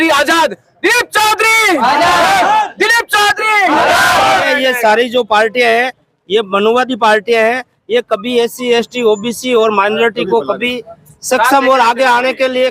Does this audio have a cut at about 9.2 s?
no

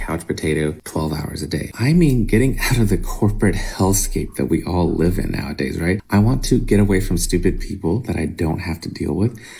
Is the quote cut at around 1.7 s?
yes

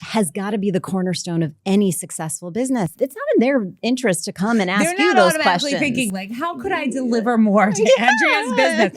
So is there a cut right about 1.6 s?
no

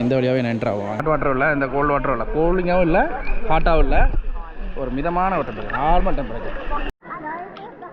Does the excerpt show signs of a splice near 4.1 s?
no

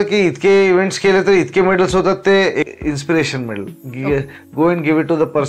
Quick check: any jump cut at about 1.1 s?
no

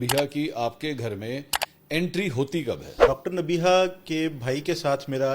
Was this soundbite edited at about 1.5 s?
no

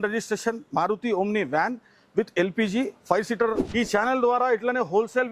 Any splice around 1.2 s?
no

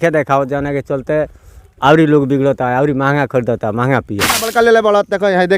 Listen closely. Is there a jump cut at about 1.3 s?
no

